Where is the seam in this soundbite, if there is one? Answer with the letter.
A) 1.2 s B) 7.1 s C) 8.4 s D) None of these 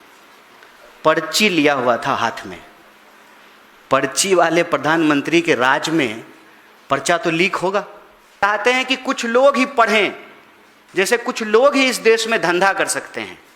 C